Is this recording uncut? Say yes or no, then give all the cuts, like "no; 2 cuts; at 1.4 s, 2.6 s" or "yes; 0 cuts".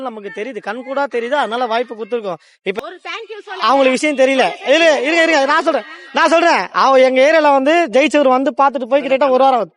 no; 1 cut; at 2.8 s